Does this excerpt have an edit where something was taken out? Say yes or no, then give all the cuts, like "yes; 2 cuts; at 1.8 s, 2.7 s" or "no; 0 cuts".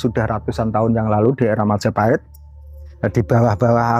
no; 0 cuts